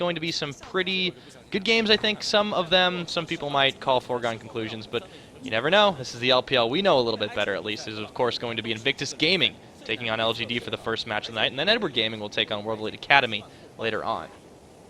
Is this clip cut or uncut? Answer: cut